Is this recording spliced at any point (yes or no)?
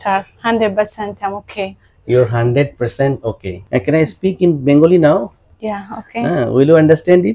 yes